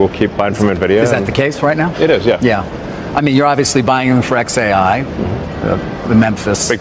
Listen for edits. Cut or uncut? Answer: uncut